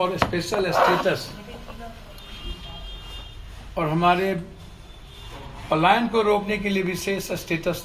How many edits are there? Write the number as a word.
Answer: zero